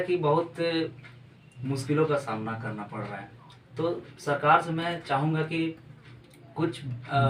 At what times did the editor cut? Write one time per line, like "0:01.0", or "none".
none